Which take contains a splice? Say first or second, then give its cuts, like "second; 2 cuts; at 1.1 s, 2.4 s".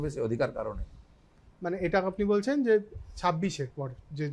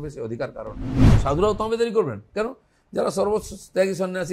second; 1 cut; at 1.1 s